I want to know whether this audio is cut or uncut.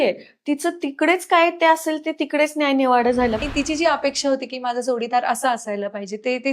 cut